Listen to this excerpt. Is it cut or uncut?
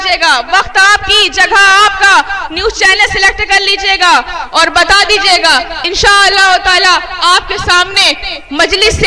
uncut